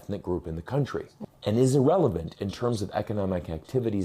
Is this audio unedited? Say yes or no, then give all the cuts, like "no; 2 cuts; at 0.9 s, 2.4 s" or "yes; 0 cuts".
no; 1 cut; at 1.1 s